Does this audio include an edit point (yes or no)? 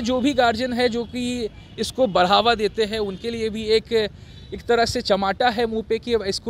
no